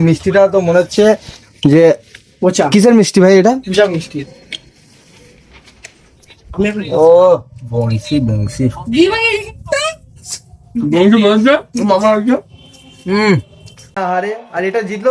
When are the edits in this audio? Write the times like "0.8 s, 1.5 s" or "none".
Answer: 13.9 s

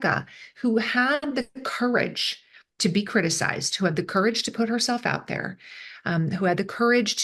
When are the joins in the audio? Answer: none

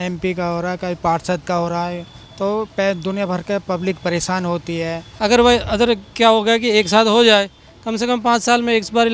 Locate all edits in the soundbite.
5.0 s

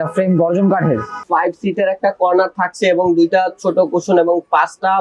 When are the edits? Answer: 1.2 s

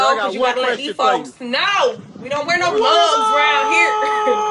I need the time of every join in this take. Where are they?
none

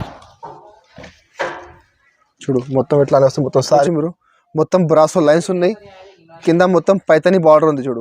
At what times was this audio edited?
3.8 s

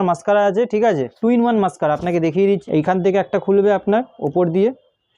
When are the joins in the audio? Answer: 1.1 s, 2.6 s

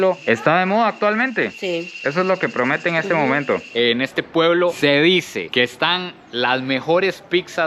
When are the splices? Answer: 3.7 s

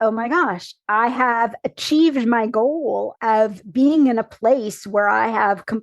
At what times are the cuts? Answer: 3.1 s

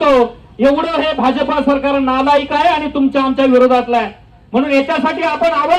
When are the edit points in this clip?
none

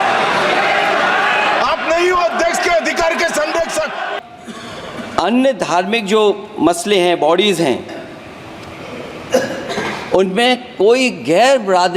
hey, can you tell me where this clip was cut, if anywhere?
4.1 s

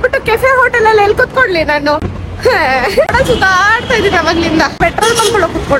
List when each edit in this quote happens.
2.2 s, 3.1 s, 4.8 s

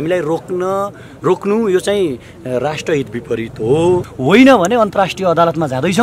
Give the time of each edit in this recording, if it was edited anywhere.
4.1 s

